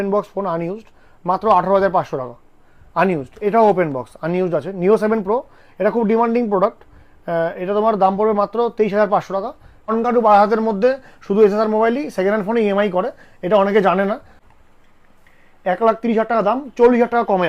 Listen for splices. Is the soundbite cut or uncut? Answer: cut